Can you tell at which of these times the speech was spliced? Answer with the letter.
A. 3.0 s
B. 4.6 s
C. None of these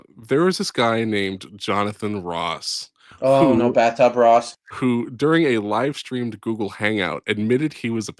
B